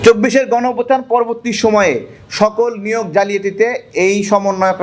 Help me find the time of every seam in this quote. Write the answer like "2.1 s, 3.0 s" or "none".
none